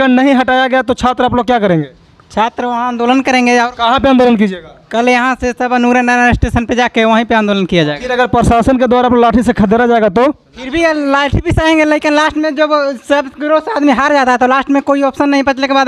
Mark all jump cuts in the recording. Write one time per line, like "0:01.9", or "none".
none